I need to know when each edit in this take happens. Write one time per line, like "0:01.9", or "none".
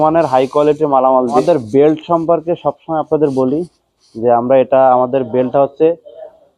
0:01.4